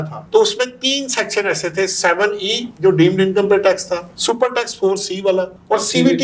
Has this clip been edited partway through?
no; 0 cuts

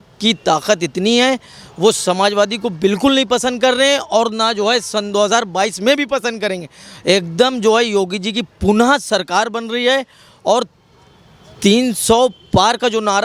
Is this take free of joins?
yes; 0 cuts

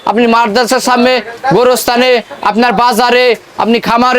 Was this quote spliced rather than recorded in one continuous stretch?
no; 0 cuts

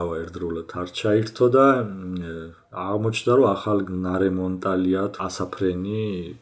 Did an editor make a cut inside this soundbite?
yes; 1 cut; at 5.1 s

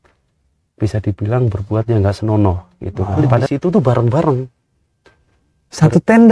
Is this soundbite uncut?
yes; 0 cuts

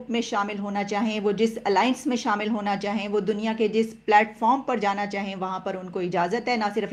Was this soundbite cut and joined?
no; 0 cuts

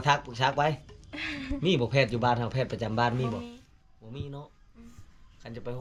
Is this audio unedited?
yes; 0 cuts

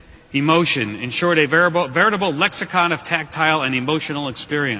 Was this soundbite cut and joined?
yes; 1 cut; at 2.6 s

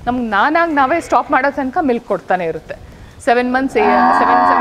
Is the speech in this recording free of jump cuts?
yes; 0 cuts

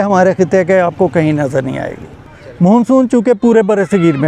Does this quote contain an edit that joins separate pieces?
no; 0 cuts

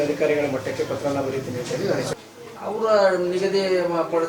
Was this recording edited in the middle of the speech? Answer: yes; 1 cut; at 2.1 s

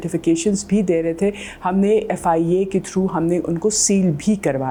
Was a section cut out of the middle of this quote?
no; 0 cuts

